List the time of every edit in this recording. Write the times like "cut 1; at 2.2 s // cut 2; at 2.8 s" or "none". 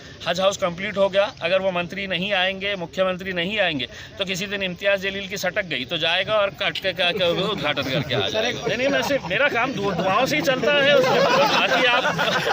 cut 1; at 8.6 s